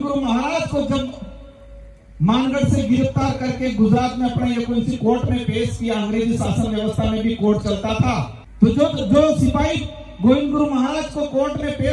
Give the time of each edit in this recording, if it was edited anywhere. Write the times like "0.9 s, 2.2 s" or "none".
none